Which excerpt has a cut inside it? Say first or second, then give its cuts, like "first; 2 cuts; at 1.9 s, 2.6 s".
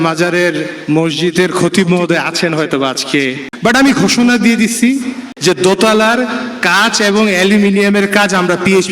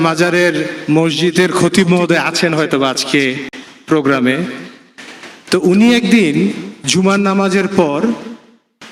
first; 2 cuts; at 3.5 s, 5.3 s